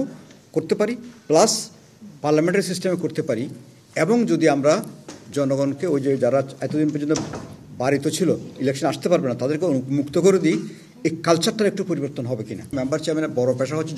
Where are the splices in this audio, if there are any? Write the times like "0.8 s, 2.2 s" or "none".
12.7 s